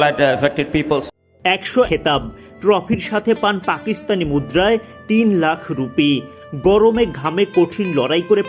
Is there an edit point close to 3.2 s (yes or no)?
no